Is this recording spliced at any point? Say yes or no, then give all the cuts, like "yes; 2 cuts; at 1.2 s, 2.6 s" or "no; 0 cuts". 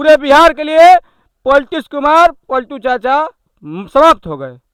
no; 0 cuts